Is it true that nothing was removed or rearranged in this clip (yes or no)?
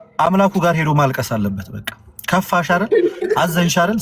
yes